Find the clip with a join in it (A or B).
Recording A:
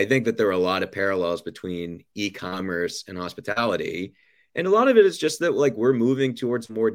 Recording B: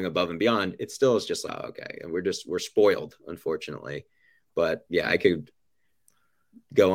B